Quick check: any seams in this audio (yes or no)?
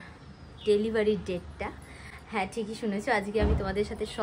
no